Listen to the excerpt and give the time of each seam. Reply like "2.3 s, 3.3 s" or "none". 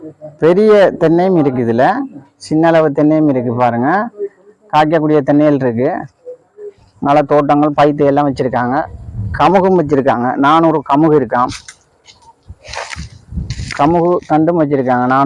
none